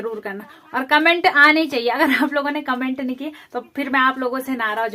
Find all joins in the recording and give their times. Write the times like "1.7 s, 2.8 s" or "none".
none